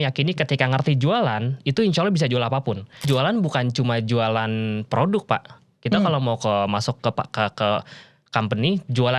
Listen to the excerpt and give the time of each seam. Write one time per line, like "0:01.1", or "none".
0:03.1